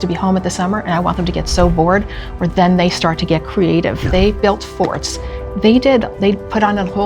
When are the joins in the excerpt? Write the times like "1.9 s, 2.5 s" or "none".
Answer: 4.0 s